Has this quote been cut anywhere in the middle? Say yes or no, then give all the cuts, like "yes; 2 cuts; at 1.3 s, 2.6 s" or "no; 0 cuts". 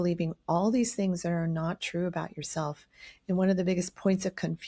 no; 0 cuts